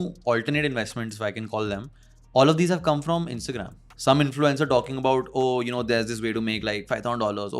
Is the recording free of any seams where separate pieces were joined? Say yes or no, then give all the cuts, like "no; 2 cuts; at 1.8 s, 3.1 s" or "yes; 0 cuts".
no; 1 cut; at 3.9 s